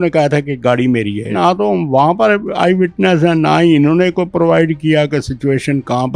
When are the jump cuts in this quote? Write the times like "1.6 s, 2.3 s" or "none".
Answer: 1.3 s